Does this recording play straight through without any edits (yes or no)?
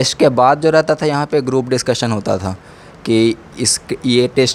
yes